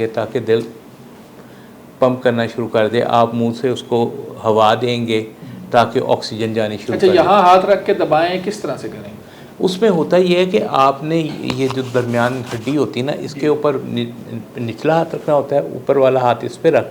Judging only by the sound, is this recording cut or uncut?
uncut